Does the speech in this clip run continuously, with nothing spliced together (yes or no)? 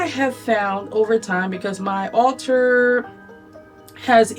yes